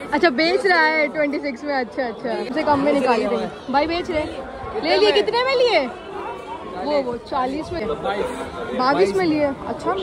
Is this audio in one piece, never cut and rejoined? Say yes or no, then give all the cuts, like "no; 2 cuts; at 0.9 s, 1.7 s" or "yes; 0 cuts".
no; 2 cuts; at 2.5 s, 7.8 s